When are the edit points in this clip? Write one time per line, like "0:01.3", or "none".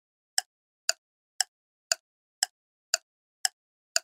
none